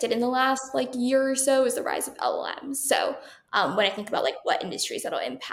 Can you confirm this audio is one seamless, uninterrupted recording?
yes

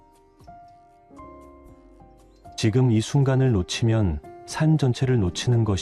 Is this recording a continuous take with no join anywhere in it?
yes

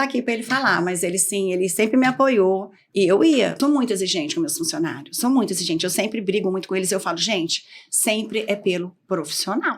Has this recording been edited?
yes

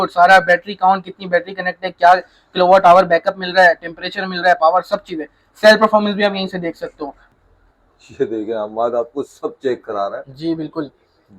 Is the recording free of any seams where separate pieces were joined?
no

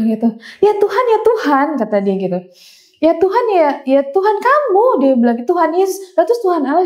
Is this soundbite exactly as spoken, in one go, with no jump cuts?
yes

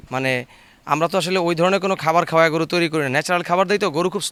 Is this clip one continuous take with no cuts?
yes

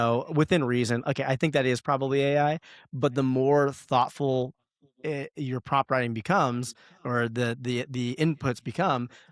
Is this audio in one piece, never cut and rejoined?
yes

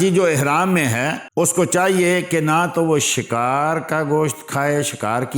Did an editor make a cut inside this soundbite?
yes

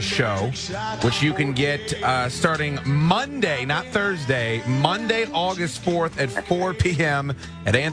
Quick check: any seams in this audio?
yes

